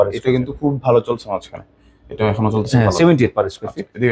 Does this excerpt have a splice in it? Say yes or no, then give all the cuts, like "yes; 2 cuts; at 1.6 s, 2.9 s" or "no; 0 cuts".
no; 0 cuts